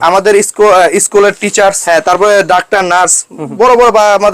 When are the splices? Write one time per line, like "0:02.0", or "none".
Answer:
0:01.8

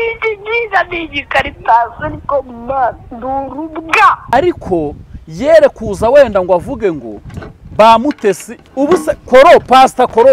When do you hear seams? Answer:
0:04.3

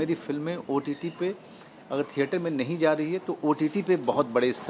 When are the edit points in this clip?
none

